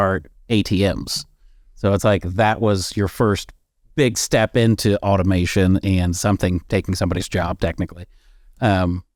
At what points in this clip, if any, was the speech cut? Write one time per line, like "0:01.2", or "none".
none